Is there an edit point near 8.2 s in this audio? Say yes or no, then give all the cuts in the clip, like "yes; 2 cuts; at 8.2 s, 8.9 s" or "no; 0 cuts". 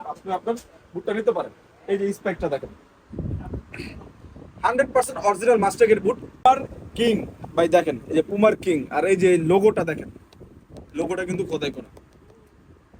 no; 1 cut; at 6.4 s